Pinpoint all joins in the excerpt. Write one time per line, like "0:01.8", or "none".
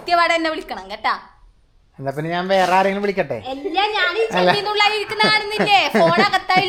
none